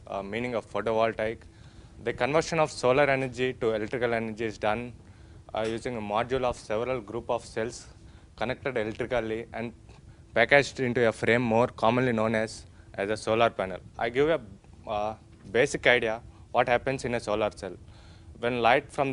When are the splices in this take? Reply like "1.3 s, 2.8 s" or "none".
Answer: 12.1 s